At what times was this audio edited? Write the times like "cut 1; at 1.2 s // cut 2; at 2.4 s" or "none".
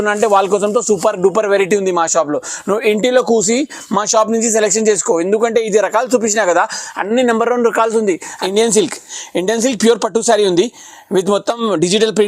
cut 1; at 8.4 s

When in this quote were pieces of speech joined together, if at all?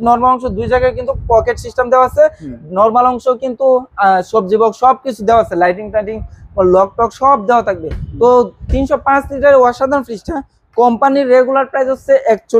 none

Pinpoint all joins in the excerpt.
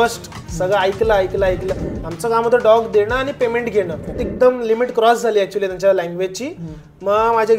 cut 1; at 1.7 s // cut 2; at 4.2 s

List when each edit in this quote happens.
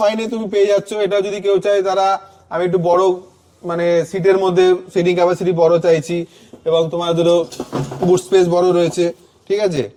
none

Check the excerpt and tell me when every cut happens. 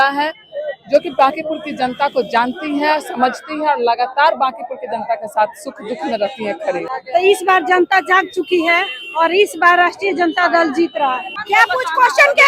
cut 1; at 6.9 s // cut 2; at 11.4 s

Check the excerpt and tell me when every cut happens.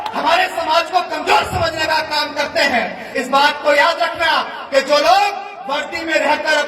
cut 1; at 3.1 s

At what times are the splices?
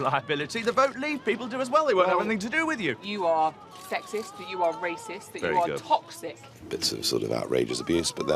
cut 1; at 3.0 s // cut 2; at 6.5 s

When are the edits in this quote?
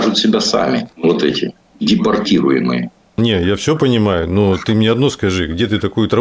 cut 1; at 0.9 s // cut 2; at 3.2 s

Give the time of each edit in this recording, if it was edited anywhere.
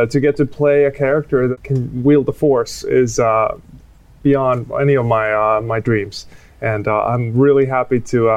cut 1; at 1.5 s

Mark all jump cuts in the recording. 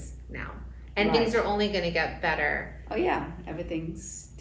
none

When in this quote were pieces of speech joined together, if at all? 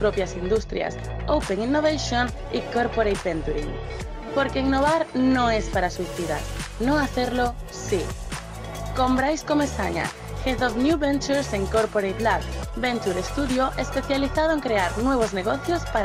none

